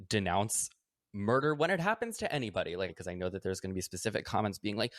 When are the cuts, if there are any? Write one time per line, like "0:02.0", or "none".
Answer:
0:02.9

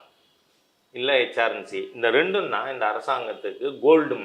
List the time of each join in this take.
none

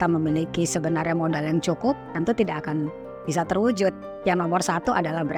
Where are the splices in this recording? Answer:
none

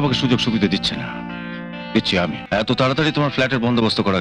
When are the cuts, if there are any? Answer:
0:02.4

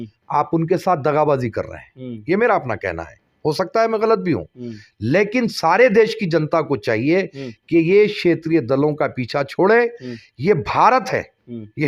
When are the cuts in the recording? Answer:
none

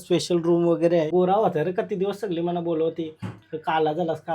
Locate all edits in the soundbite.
0:01.1

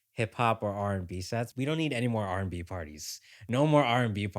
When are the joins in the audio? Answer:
0:01.5

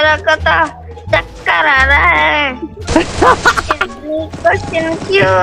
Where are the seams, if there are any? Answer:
none

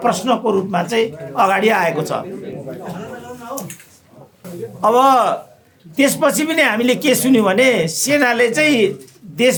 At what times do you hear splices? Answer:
none

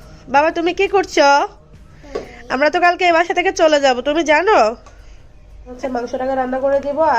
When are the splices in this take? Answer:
0:05.7

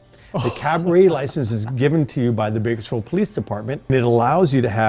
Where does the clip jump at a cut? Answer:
0:03.9

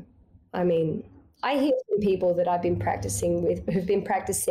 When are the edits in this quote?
0:01.0

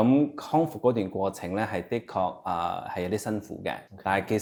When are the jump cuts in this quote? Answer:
none

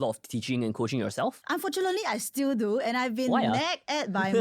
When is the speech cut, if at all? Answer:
0:01.4

